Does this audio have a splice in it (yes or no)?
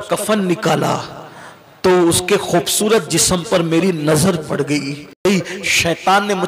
yes